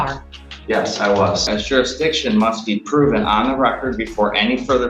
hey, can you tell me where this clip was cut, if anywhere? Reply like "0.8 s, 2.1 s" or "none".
1.4 s